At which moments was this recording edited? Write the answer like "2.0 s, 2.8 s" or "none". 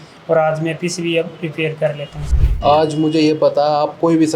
2.2 s

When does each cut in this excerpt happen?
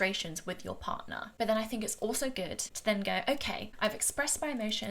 2.6 s, 3.7 s

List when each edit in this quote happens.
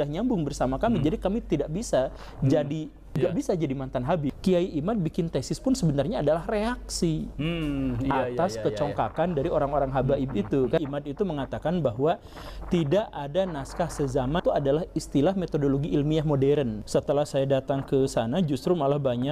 3.2 s, 4.4 s, 10.8 s, 14.4 s, 16.8 s

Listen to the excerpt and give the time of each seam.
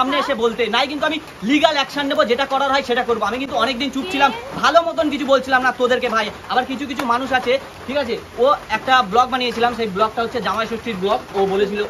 none

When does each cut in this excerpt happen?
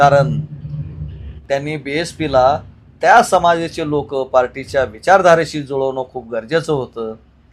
1.3 s

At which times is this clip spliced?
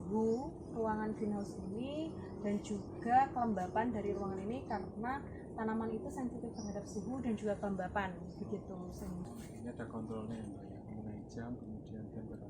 9.3 s

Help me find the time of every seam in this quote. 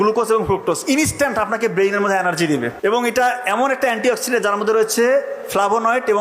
2.7 s

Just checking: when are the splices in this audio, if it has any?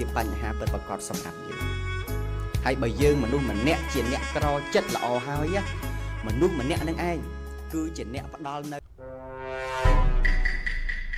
8.8 s

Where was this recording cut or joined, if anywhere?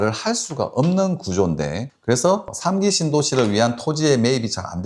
none

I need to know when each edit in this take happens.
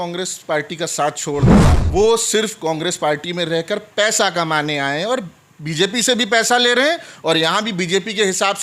1.7 s

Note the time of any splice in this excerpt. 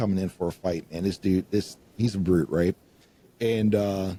none

